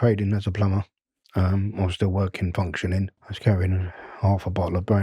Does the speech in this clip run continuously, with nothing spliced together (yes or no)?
no